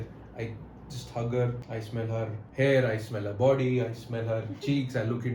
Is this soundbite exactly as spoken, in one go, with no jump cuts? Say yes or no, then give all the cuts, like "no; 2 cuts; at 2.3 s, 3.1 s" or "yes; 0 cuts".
no; 1 cut; at 2.0 s